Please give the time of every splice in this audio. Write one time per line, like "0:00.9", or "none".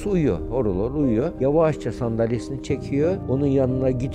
0:01.3